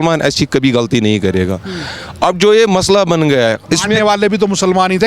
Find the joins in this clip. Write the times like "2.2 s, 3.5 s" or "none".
none

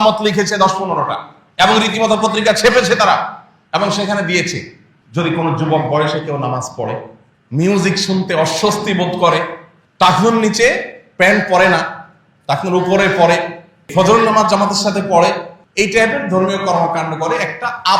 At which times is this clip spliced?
15.6 s

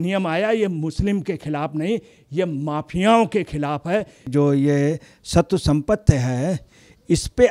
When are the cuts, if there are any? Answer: 4.3 s

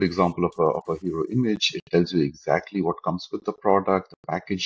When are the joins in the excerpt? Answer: none

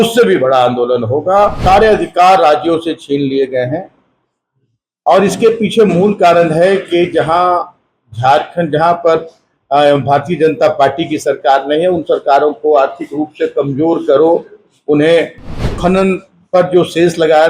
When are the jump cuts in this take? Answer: 1.6 s, 15.7 s

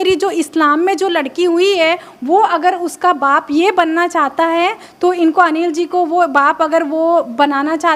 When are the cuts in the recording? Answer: none

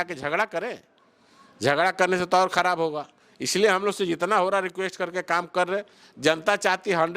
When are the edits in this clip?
none

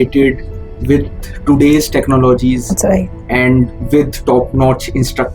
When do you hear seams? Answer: none

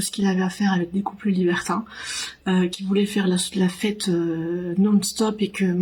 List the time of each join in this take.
none

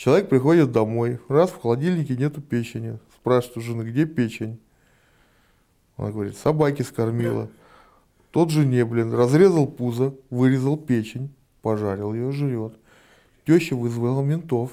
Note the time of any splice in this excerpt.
none

